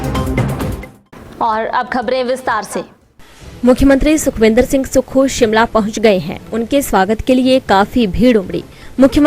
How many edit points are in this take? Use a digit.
1